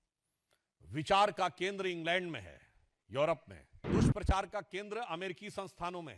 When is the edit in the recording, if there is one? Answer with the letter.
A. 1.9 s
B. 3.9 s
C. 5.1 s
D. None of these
B